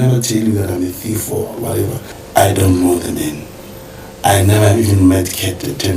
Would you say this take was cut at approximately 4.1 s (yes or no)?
no